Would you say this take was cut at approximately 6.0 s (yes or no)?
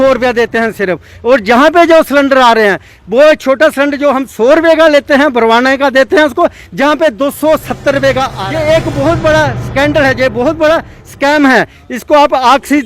no